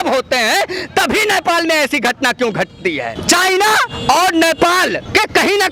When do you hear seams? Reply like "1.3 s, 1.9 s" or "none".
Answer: none